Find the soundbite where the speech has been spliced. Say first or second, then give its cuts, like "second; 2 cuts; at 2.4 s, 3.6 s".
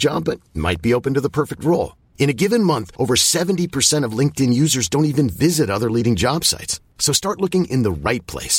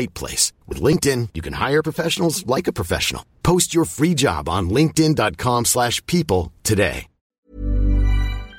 second; 1 cut; at 7.3 s